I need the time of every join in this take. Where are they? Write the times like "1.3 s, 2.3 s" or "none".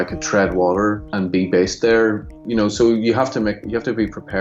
1.1 s, 2.3 s